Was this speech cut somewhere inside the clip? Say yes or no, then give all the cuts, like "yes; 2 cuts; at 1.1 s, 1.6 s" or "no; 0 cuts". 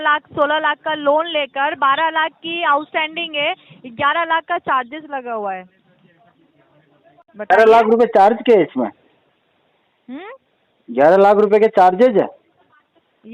no; 0 cuts